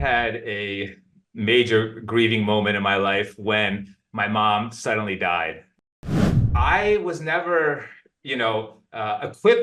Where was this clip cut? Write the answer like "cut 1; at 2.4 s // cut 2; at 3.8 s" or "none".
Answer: cut 1; at 6.1 s